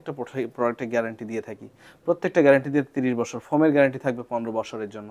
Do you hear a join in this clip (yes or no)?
no